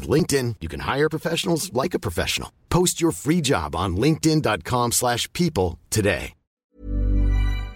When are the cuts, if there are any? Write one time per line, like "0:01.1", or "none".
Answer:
0:06.7